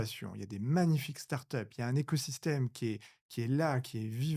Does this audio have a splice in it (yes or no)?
no